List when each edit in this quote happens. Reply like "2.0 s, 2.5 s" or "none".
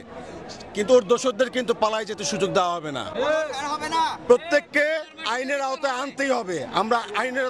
none